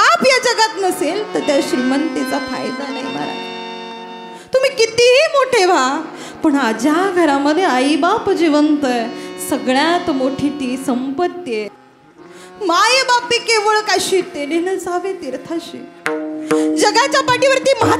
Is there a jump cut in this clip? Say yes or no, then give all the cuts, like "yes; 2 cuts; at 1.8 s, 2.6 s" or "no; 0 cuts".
yes; 1 cut; at 11.8 s